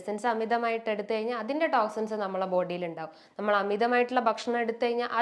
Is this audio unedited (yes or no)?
yes